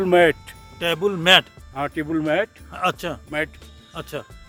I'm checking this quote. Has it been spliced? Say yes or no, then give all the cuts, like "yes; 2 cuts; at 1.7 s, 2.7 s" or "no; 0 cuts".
no; 0 cuts